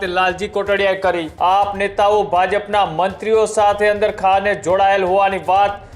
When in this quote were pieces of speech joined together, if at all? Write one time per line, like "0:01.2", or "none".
0:01.3